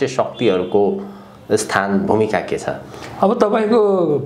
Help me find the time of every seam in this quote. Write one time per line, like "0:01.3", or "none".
none